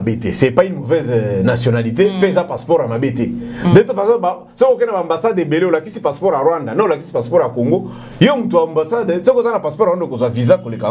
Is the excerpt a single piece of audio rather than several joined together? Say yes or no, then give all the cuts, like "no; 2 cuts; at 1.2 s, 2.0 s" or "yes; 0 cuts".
yes; 0 cuts